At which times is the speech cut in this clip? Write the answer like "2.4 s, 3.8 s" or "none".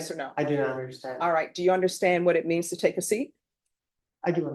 none